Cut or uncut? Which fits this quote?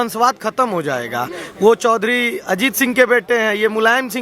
uncut